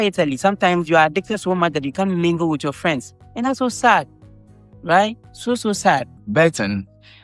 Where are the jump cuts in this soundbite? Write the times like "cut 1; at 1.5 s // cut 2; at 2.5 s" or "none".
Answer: cut 1; at 6.2 s